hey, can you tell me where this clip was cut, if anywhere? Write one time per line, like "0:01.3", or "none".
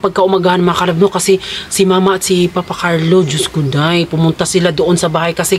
none